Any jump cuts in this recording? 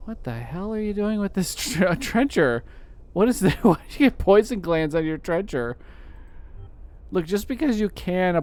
no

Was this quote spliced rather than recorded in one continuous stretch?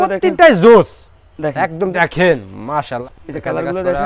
yes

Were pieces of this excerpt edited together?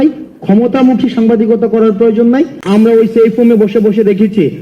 yes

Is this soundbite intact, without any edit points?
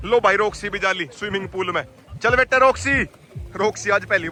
yes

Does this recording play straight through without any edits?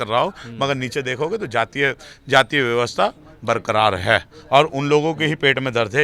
yes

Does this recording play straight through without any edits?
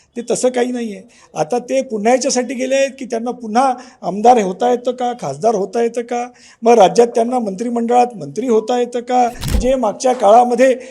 no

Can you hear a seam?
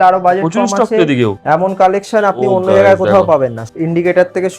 yes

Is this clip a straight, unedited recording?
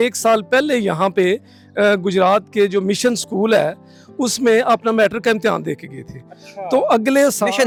yes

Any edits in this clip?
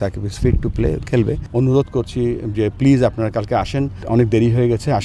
yes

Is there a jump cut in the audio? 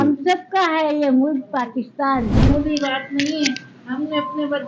yes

